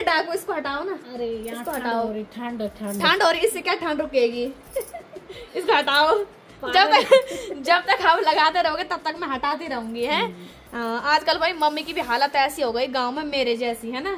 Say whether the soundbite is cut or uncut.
uncut